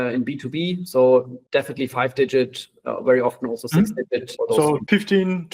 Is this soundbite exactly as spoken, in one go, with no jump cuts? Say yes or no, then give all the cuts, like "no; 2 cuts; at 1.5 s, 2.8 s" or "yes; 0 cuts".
no; 2 cuts; at 1.4 s, 4.3 s